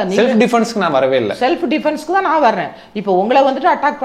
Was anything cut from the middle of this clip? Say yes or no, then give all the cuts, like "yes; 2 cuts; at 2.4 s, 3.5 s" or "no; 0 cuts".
no; 0 cuts